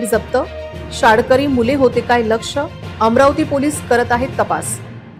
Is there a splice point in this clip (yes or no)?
no